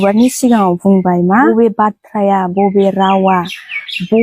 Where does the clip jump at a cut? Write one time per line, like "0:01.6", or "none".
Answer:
0:01.5